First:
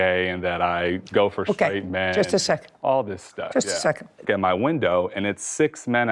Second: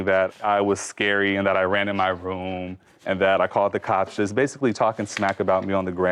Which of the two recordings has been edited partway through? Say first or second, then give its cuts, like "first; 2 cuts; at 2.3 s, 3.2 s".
first; 1 cut; at 4.2 s